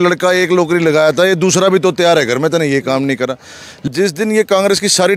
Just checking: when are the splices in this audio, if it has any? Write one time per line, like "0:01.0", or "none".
0:03.9